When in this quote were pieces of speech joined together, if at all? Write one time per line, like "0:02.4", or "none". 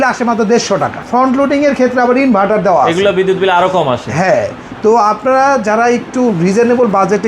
0:01.0